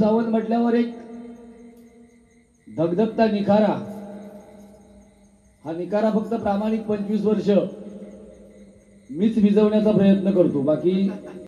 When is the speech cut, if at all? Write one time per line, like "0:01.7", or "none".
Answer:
none